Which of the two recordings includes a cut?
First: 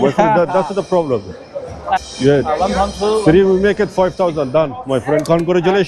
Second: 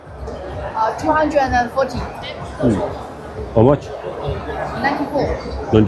first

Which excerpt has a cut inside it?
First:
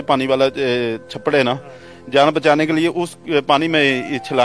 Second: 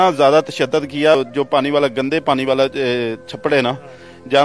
second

